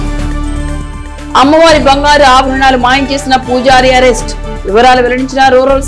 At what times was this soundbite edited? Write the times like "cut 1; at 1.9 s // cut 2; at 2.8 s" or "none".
none